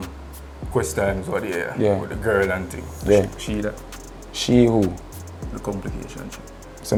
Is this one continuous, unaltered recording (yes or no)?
yes